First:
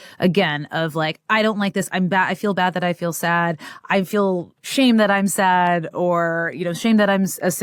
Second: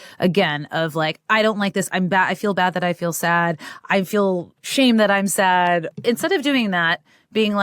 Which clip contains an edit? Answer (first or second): second